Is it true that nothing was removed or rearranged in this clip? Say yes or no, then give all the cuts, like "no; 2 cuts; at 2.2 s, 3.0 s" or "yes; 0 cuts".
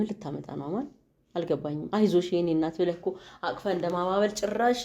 yes; 0 cuts